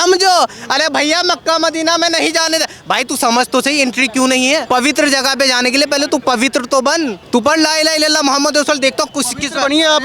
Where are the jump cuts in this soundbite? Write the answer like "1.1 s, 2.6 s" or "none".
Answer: 4.6 s, 7.2 s